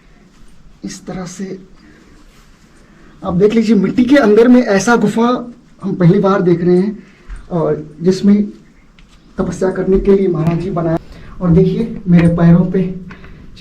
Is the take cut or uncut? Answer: cut